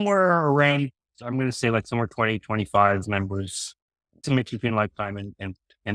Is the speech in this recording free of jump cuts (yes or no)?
no